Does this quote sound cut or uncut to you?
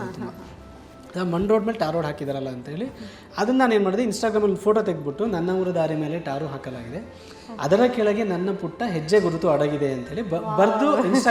uncut